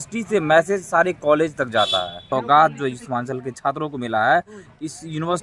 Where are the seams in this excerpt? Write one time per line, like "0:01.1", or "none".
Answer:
0:02.2